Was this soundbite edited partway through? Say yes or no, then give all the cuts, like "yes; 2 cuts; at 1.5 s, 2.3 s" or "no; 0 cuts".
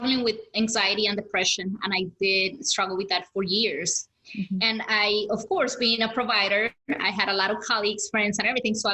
yes; 1 cut; at 6.7 s